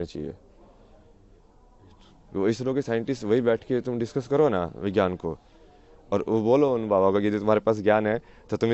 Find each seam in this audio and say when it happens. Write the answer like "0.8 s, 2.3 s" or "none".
none